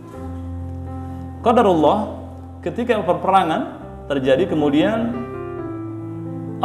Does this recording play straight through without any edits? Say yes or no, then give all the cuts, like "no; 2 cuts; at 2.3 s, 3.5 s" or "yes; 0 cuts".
no; 1 cut; at 1.3 s